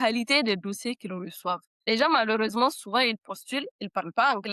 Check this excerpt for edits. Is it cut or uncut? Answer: cut